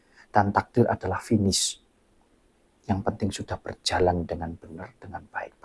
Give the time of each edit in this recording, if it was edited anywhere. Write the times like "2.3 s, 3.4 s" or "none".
none